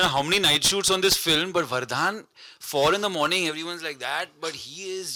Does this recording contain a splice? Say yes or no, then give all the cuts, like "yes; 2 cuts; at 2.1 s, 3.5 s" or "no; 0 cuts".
no; 0 cuts